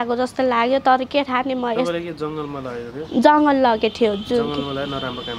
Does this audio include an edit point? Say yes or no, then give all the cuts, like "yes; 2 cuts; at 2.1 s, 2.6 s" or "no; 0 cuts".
no; 0 cuts